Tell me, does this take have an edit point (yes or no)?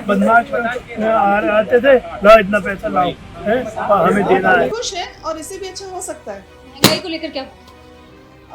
yes